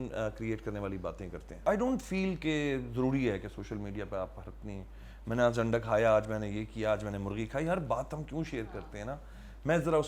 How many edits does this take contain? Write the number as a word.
one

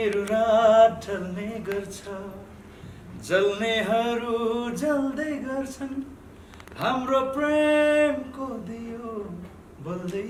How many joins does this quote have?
zero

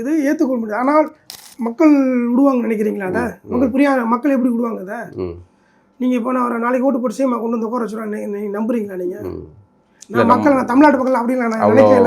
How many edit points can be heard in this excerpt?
one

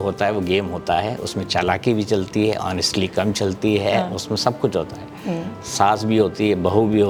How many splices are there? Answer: zero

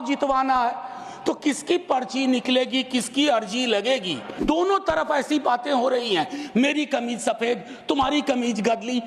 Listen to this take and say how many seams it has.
one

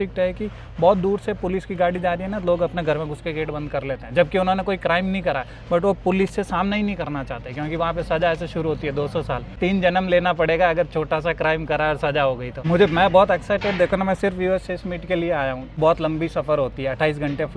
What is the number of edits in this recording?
three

